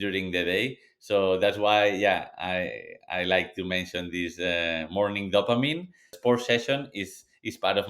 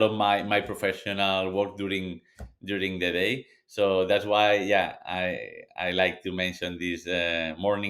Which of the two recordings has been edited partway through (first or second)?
first